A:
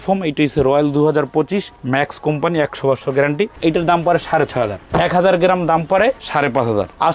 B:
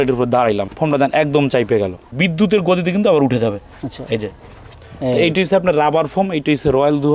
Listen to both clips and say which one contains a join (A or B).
A